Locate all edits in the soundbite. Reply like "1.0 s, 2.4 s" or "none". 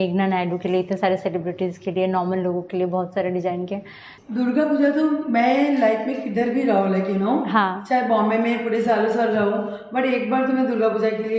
4.1 s

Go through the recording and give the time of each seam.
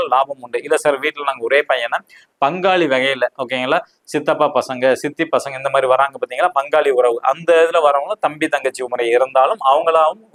none

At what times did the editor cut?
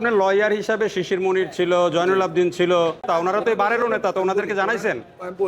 3.1 s

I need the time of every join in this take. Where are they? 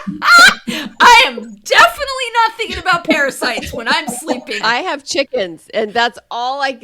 4.6 s

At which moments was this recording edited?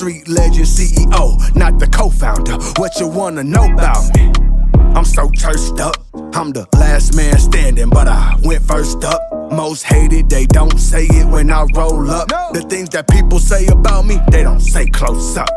none

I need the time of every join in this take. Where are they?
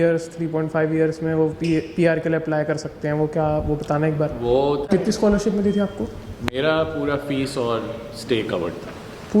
4.8 s

